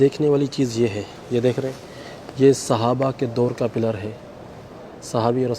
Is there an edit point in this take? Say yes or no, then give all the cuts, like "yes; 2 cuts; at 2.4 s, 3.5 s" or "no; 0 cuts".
yes; 1 cut; at 1.1 s